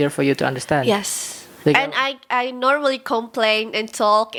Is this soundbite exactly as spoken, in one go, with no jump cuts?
yes; 0 cuts

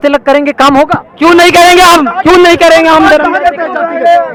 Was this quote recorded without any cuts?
yes; 0 cuts

